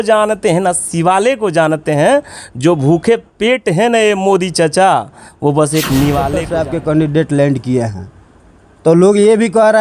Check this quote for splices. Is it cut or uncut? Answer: cut